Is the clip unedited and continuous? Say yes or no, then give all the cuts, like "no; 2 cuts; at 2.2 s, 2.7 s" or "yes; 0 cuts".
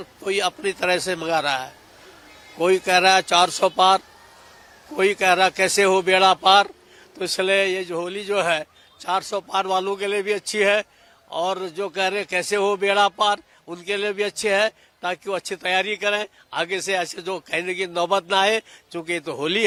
yes; 0 cuts